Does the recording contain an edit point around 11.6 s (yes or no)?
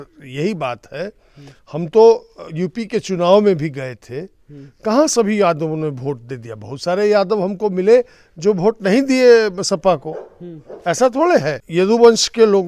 yes